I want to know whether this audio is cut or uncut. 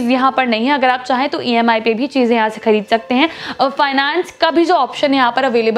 uncut